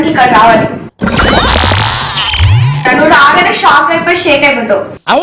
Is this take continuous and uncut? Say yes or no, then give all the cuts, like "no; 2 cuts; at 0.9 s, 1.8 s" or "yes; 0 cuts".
no; 1 cut; at 2.8 s